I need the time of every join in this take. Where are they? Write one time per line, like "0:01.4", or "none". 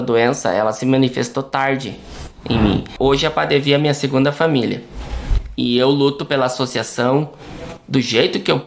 0:02.9